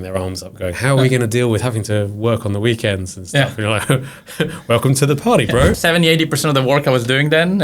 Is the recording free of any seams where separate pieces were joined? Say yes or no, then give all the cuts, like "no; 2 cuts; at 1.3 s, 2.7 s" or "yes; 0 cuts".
no; 1 cut; at 5.8 s